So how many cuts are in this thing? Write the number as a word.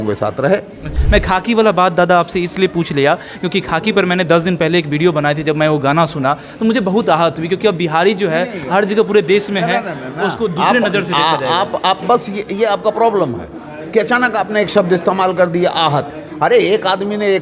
one